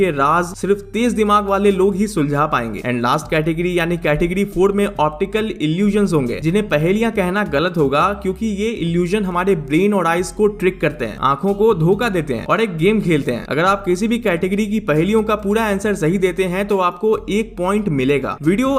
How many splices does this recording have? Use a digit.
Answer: 0